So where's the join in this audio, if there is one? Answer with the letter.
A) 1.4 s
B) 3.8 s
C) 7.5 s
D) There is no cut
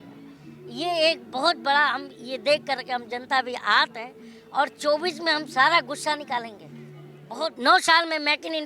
C